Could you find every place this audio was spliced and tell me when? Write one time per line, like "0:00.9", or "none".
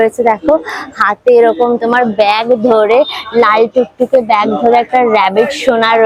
none